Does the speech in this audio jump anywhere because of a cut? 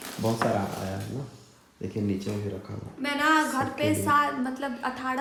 no; 0 cuts

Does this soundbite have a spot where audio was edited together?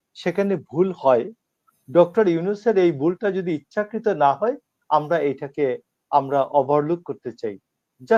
no; 0 cuts

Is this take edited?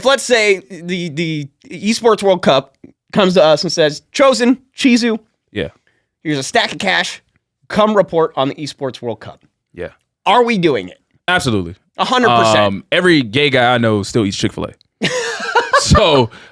no; 0 cuts

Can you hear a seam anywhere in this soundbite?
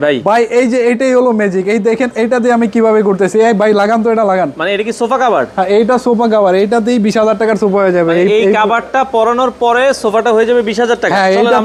no; 0 cuts

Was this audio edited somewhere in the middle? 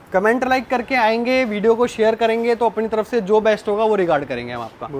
no; 0 cuts

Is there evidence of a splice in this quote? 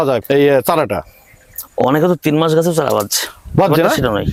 no; 0 cuts

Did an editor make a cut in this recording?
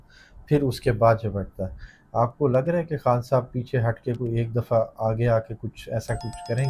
no; 0 cuts

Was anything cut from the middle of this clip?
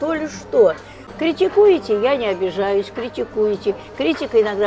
yes; 1 cut; at 1.1 s

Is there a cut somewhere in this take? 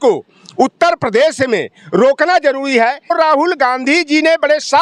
yes; 1 cut; at 3.1 s

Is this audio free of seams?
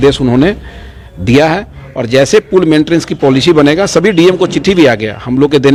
yes; 0 cuts

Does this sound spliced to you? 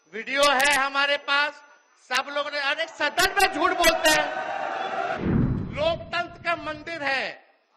yes; 1 cut; at 5.2 s

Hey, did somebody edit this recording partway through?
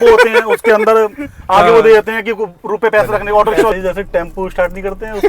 yes; 1 cut; at 3.7 s

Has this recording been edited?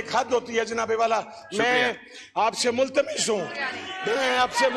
no; 0 cuts

